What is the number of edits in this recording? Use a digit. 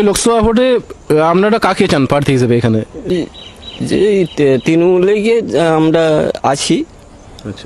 1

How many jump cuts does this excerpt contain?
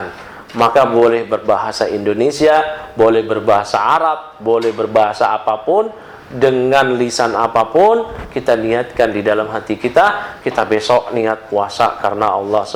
0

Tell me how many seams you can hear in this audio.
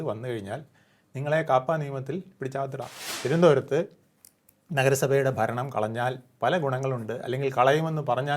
1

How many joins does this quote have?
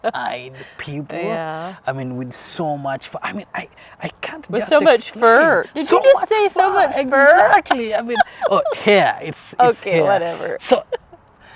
0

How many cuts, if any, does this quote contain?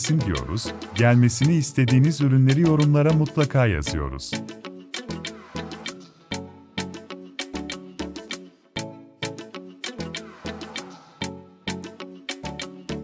1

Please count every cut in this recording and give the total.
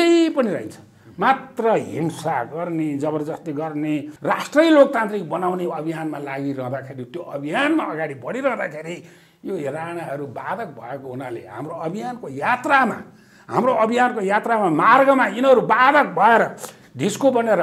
1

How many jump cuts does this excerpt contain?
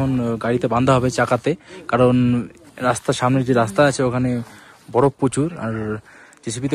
0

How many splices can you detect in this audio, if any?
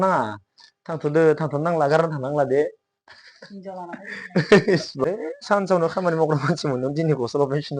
1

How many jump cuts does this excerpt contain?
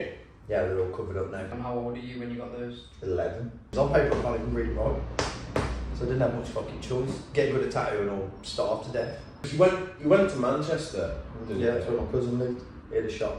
3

